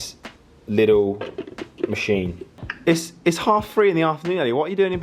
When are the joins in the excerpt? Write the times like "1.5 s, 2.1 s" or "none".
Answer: 2.6 s